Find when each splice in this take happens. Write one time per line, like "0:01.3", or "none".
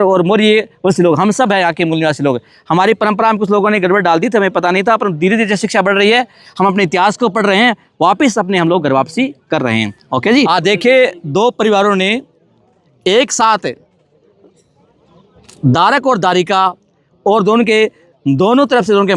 0:10.5

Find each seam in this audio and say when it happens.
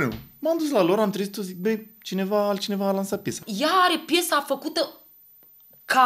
0:03.4

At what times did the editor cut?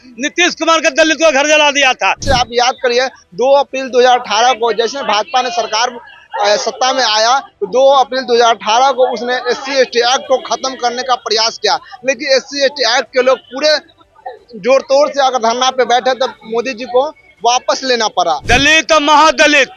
0:02.2
0:18.4

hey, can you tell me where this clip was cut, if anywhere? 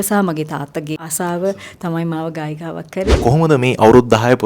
0:01.1
0:03.1

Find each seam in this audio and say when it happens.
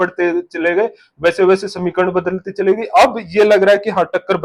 none

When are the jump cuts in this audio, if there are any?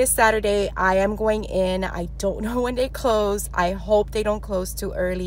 none

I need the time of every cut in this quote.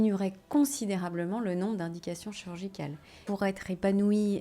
0:03.2

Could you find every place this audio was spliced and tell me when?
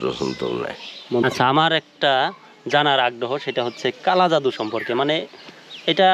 0:01.2

